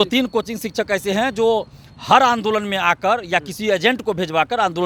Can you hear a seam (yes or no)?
no